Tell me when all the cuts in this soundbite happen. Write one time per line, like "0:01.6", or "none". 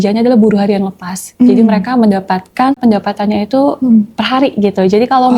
0:02.8